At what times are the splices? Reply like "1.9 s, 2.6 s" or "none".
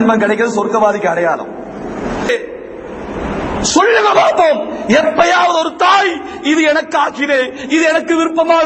2.3 s